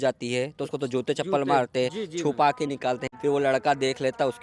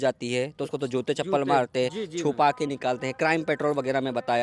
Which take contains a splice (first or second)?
first